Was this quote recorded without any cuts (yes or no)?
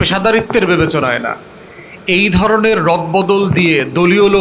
yes